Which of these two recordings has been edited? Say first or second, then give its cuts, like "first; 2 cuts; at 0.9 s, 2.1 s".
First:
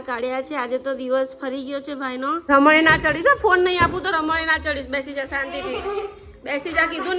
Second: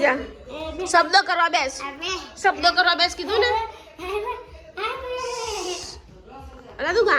first; 1 cut; at 2.4 s